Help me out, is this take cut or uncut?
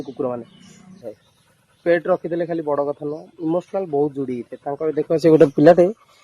cut